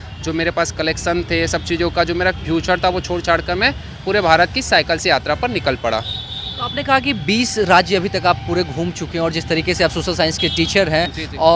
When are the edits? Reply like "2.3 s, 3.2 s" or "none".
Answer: none